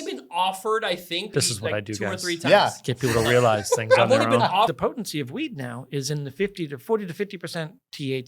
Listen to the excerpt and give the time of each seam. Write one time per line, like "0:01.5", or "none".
0:01.3
0:04.7